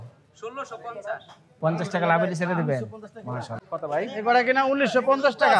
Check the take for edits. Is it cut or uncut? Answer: cut